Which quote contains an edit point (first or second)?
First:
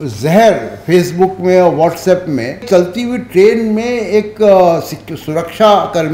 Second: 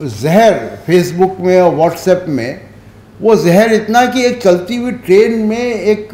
first